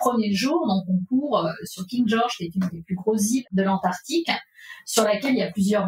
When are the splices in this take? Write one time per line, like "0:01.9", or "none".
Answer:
0:03.5